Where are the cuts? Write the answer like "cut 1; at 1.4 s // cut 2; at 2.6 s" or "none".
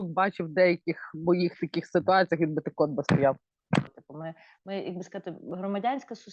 cut 1; at 3.9 s